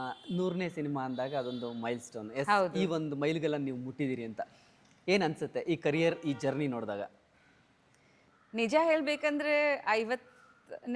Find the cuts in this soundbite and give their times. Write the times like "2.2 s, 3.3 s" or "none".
none